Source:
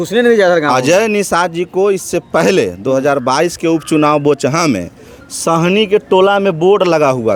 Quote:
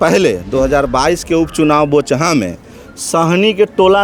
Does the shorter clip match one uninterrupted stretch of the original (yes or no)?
yes